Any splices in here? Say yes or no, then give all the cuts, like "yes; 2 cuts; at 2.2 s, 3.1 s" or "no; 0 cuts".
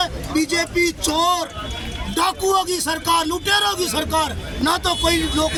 no; 0 cuts